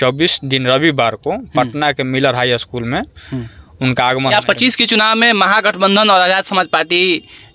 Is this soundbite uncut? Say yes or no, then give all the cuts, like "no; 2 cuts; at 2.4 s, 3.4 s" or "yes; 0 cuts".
no; 1 cut; at 4.3 s